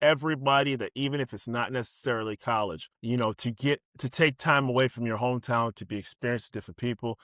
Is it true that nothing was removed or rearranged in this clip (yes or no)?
no